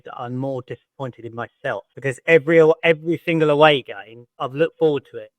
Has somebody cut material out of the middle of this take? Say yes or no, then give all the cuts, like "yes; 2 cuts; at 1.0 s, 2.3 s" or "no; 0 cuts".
yes; 2 cuts; at 1.9 s, 4.4 s